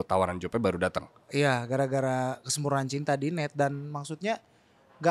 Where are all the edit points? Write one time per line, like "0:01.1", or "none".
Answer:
none